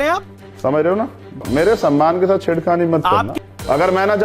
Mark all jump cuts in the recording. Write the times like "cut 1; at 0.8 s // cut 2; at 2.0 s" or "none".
cut 1; at 1.4 s // cut 2; at 3.3 s